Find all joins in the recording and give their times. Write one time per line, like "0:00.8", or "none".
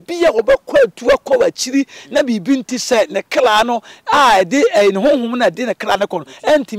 none